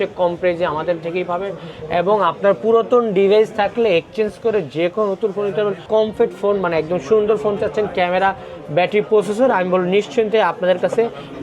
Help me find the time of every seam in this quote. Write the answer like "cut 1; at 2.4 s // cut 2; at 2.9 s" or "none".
cut 1; at 5.9 s